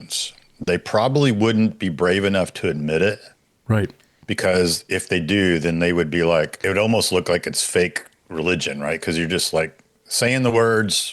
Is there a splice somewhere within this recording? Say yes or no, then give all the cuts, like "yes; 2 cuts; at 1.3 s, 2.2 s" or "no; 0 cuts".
yes; 1 cut; at 6.6 s